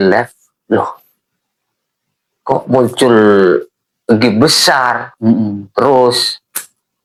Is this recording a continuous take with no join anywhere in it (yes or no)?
yes